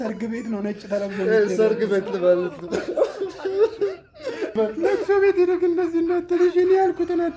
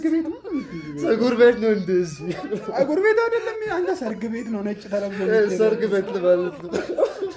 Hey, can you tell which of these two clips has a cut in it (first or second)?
first